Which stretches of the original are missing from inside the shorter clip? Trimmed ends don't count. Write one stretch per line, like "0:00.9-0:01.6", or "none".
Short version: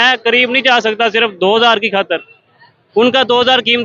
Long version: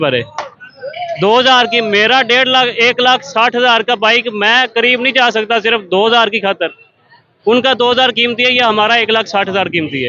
none